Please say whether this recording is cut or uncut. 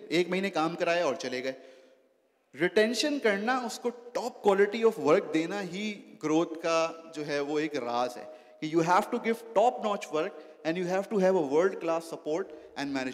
uncut